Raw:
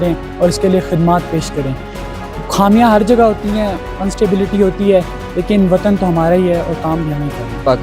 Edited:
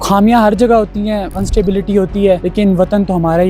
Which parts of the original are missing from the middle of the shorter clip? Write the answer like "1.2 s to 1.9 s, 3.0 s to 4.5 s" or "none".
3.8 s to 4.0 s, 5.1 s to 5.4 s